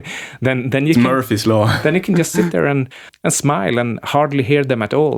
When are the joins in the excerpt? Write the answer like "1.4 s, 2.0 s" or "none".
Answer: none